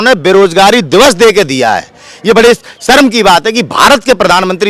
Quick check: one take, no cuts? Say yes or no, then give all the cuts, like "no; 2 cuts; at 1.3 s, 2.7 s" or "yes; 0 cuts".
yes; 0 cuts